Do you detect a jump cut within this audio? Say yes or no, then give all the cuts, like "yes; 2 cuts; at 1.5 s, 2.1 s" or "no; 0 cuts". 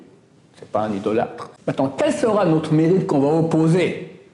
yes; 1 cut; at 1.5 s